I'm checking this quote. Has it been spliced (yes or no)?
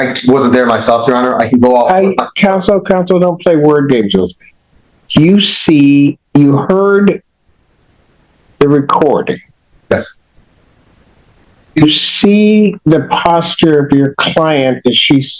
no